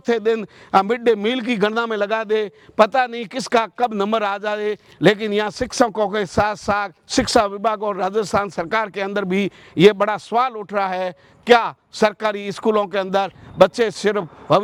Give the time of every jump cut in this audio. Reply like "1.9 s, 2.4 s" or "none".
none